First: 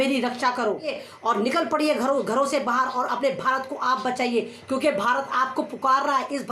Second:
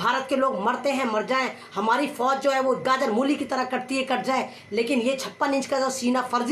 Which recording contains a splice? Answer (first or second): first